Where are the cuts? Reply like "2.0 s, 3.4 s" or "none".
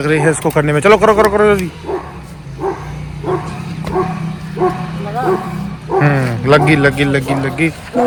none